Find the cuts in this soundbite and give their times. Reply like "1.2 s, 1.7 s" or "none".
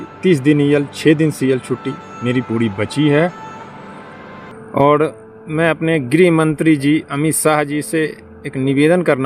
4.4 s